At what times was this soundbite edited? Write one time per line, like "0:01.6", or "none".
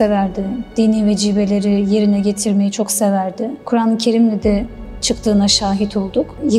0:03.6